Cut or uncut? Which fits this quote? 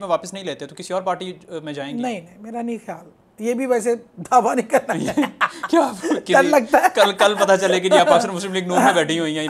uncut